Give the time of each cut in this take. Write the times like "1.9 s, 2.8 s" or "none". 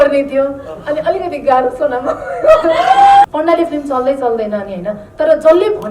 3.3 s

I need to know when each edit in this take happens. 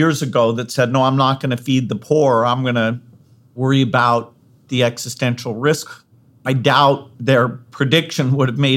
4.7 s, 5.9 s

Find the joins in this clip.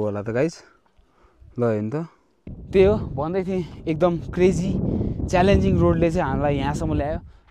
2.6 s

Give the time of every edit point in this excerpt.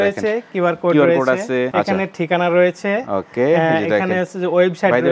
1.7 s

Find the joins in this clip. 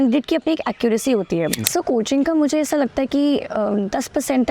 1.6 s

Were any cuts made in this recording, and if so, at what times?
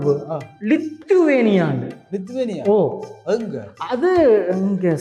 none

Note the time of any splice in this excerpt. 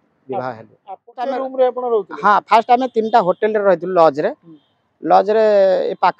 1.1 s

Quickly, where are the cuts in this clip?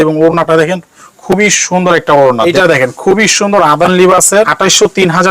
2.4 s, 4.5 s

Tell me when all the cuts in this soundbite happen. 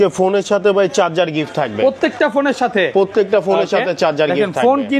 none

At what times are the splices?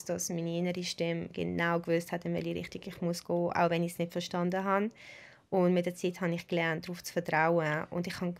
none

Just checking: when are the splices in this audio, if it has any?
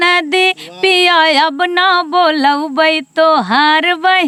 none

